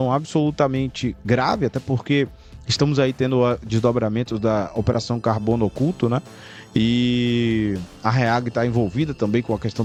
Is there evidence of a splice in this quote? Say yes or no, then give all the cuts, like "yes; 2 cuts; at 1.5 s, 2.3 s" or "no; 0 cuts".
no; 0 cuts